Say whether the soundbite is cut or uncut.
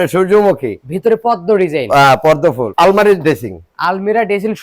cut